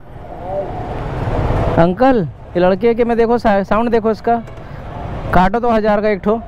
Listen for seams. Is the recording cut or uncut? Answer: uncut